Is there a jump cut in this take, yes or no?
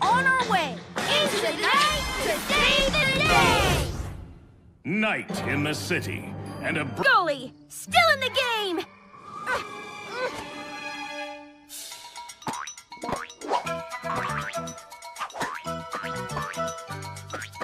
no